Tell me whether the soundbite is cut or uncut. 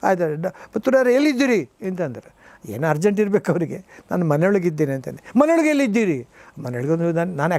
uncut